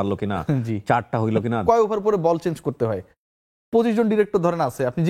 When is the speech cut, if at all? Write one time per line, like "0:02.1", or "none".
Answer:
0:01.6